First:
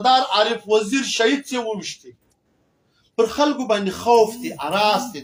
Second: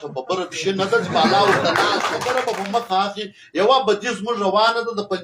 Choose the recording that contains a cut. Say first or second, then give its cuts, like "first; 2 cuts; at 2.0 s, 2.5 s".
second; 1 cut; at 2.2 s